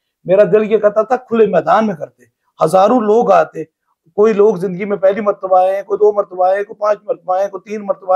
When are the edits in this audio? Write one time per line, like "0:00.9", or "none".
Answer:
none